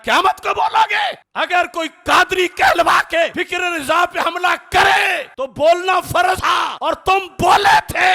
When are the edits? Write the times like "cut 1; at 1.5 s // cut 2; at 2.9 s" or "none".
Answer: cut 1; at 3.4 s // cut 2; at 6.5 s